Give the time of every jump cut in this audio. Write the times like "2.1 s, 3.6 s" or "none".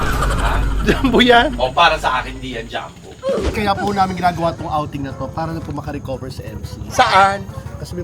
3.5 s